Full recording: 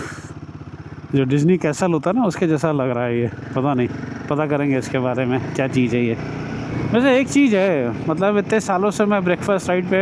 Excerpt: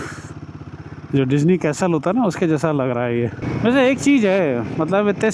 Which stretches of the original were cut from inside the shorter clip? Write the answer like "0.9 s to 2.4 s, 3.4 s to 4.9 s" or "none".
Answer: 3.4 s to 6.7 s